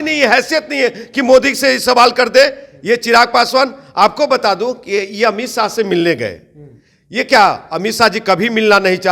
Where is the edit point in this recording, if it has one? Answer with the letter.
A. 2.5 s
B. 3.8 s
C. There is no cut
C